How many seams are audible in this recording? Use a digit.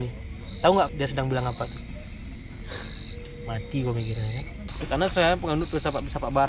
3